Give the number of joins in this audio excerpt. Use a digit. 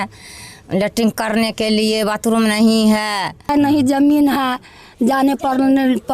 1